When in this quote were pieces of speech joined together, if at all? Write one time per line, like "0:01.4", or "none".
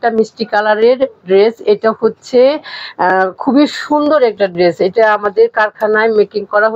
none